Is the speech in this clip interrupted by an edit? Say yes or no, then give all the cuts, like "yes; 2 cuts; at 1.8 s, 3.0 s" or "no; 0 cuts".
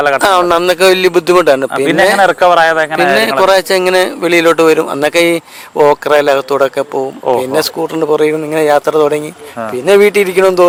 no; 0 cuts